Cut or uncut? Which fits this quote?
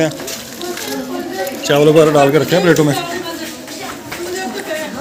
uncut